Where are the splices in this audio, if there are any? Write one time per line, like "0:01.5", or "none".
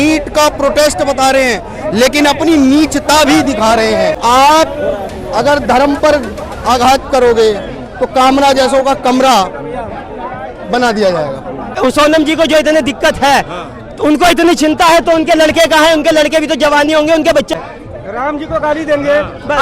0:04.2
0:11.8
0:17.5